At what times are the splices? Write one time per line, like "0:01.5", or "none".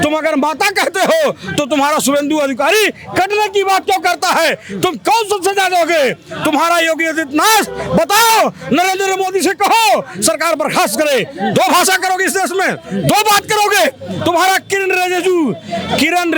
none